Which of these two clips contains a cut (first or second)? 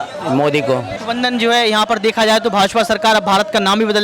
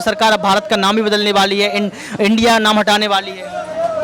first